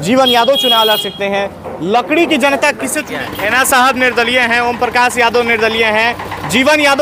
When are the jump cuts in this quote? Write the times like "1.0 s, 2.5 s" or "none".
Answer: 3.2 s